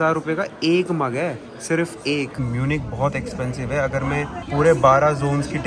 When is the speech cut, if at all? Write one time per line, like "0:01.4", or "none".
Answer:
0:02.4
0:04.4